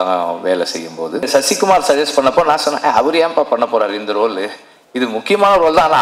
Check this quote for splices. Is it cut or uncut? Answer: cut